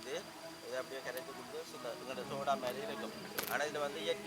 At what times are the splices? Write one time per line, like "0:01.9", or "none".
none